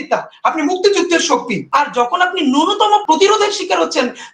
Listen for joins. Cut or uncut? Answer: cut